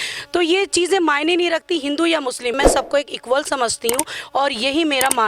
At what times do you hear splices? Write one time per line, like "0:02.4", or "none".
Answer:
0:02.6